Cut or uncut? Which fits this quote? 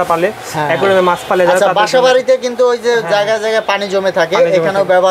uncut